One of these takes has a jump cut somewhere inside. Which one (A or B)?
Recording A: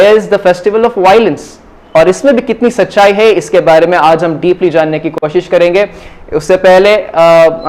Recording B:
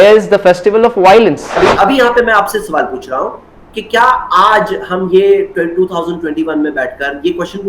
B